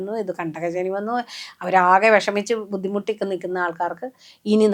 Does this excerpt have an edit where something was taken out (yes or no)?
no